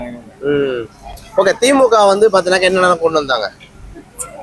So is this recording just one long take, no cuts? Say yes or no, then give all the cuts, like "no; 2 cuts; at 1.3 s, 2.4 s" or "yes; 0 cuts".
yes; 0 cuts